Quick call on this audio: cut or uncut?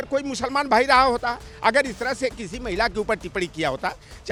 uncut